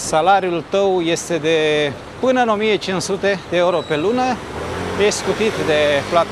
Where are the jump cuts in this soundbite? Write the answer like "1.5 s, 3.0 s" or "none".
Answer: none